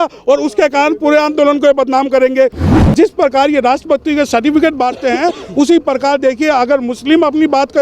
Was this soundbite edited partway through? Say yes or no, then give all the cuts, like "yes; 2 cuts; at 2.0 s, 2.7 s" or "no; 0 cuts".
yes; 1 cut; at 2.7 s